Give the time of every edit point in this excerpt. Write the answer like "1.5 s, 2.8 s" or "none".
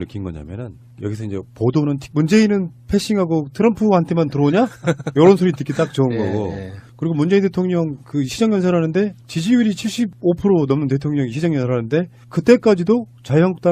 none